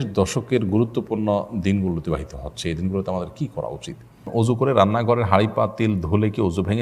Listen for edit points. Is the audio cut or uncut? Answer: cut